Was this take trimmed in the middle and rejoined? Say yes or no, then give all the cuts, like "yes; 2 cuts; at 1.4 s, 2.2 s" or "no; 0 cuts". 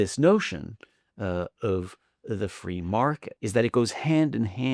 yes; 1 cut; at 3.3 s